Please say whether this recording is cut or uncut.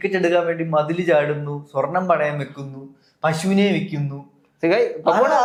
uncut